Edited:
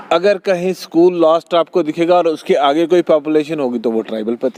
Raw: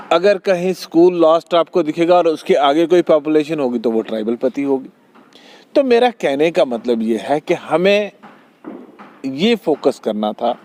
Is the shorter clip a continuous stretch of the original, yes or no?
yes